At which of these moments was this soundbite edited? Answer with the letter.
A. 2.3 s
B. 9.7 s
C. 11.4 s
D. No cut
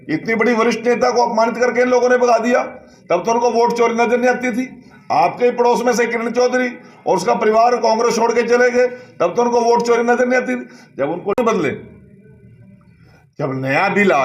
C